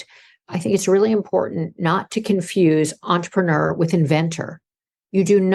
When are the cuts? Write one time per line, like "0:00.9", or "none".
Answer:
none